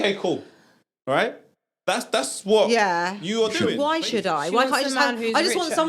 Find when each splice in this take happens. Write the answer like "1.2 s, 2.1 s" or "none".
3.6 s